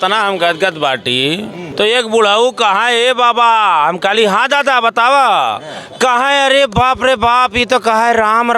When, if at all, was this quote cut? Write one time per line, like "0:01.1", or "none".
0:01.6